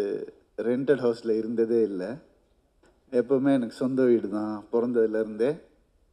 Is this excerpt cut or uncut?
uncut